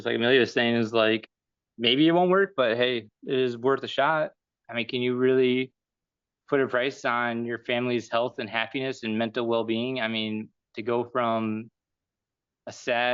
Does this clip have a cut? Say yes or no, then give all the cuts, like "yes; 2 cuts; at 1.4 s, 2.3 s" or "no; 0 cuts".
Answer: yes; 1 cut; at 4.5 s